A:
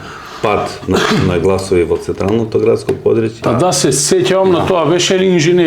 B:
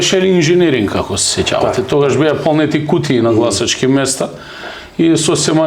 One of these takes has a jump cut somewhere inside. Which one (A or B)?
A